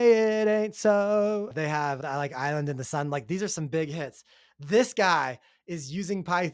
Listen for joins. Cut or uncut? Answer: cut